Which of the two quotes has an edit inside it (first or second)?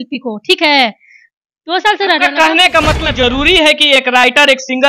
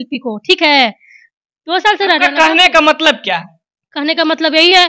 first